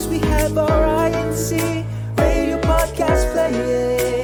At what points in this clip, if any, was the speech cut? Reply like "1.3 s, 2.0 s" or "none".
none

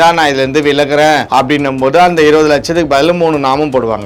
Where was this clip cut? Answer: 1.2 s

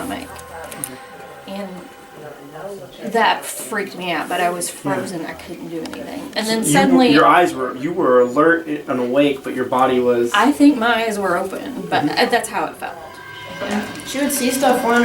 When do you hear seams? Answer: 13.6 s

